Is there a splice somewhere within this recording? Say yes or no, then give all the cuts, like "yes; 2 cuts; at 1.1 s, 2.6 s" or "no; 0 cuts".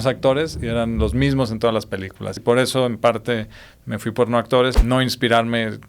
yes; 2 cuts; at 2.4 s, 4.8 s